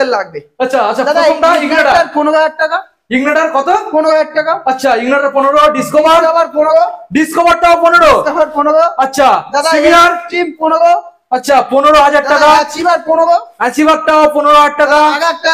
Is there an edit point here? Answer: no; 0 cuts

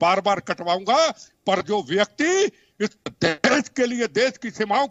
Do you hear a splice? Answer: no; 0 cuts

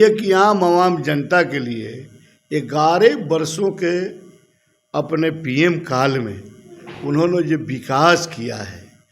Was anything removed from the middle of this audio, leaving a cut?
no; 0 cuts

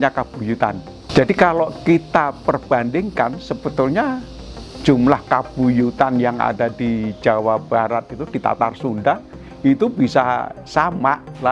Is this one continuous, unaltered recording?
yes; 0 cuts

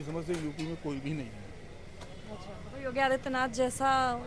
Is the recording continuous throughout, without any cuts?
yes; 0 cuts

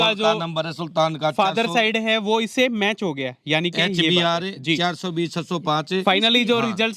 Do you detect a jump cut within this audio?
no; 0 cuts

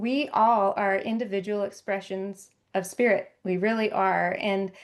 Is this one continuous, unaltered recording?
yes; 0 cuts

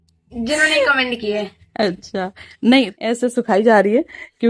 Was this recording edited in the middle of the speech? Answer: yes; 1 cut; at 2.9 s

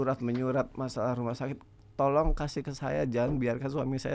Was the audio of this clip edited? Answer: no; 0 cuts

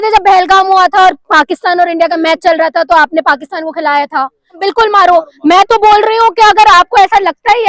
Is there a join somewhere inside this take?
yes; 1 cut; at 4.6 s

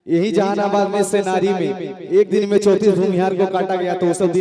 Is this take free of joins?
yes; 0 cuts

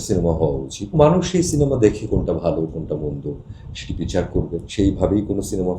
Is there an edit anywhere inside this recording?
yes; 2 cuts; at 0.9 s, 4.7 s

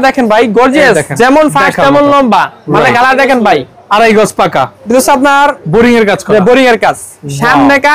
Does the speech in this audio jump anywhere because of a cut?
yes; 2 cuts; at 1.1 s, 4.8 s

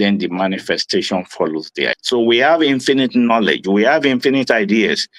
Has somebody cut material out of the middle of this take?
yes; 1 cut; at 2.0 s

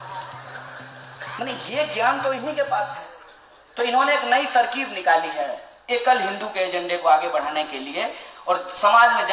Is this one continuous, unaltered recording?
yes; 0 cuts

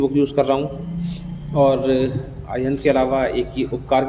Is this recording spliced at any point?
no; 0 cuts

